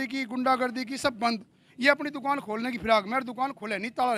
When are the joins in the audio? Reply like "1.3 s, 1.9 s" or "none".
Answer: none